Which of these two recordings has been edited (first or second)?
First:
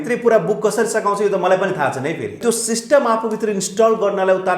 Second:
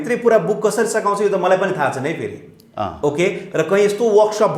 first